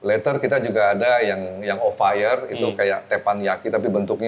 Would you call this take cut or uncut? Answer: uncut